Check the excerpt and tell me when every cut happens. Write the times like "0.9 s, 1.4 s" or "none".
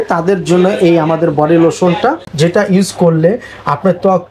2.3 s

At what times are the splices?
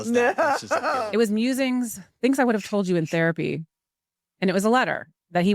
1.0 s

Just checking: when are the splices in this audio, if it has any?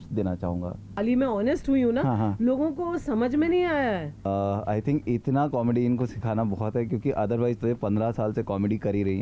1.0 s, 4.1 s

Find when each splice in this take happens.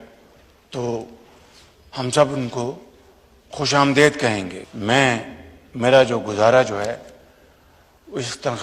4.6 s

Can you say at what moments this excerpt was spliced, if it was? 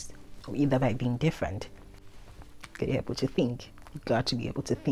2.0 s

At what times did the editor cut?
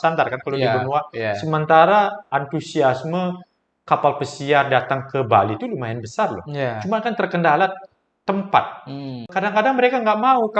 9.3 s

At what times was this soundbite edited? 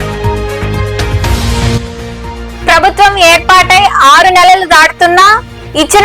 1.1 s

